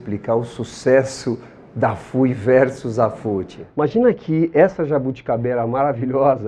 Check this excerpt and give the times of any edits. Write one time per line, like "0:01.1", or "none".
0:03.5